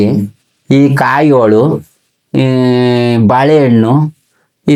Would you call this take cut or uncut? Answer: uncut